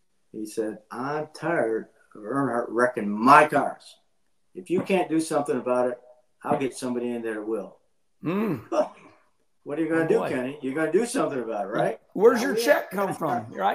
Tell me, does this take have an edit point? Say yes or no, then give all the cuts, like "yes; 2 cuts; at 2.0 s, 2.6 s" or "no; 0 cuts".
yes; 1 cut; at 12.0 s